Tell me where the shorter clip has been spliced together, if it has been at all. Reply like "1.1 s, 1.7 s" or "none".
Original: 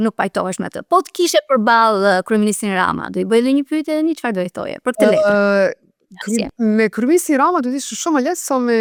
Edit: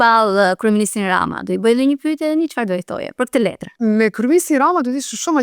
3.3 s